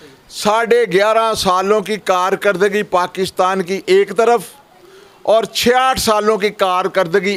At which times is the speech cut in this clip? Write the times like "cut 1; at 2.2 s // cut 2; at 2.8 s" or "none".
none